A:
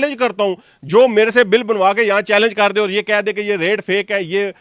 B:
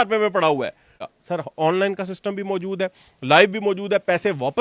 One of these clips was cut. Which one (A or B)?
B